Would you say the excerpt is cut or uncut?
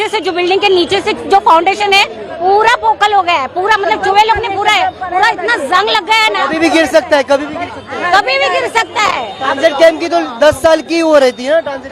uncut